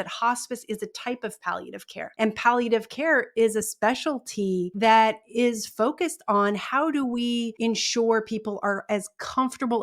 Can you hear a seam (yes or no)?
yes